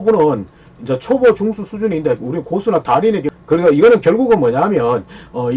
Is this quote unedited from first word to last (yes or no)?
no